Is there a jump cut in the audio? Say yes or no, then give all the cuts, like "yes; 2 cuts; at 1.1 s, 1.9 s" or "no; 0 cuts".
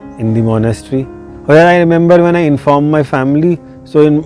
yes; 1 cut; at 1.2 s